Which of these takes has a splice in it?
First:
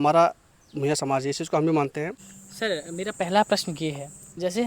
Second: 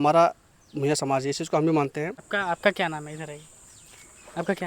first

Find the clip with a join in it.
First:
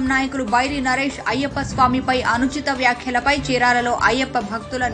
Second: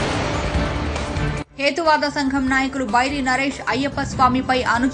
second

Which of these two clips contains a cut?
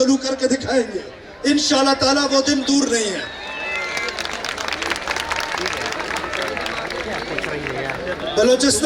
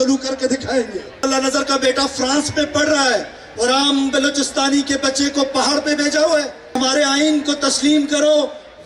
second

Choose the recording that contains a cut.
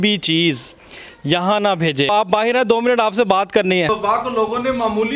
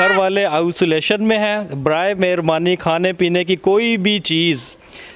first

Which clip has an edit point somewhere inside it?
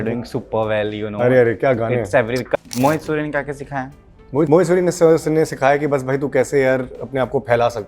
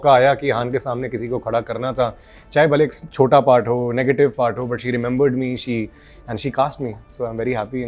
first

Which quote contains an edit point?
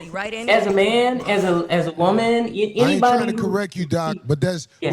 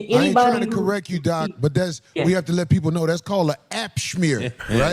first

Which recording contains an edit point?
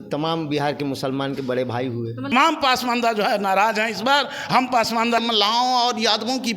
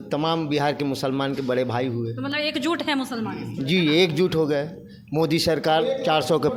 first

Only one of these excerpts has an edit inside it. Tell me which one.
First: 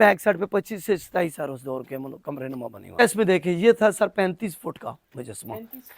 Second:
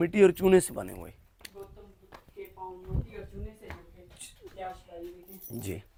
first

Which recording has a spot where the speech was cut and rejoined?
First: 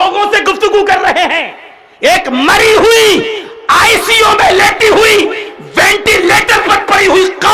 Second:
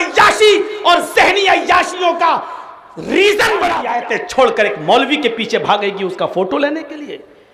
second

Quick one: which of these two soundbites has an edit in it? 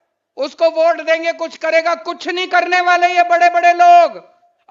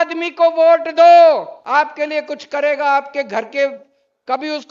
second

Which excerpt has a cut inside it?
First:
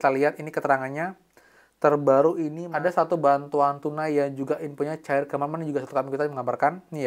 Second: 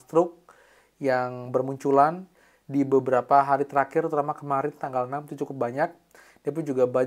first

